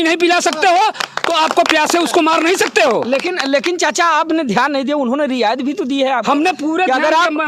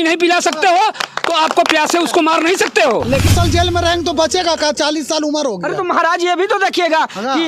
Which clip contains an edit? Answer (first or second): second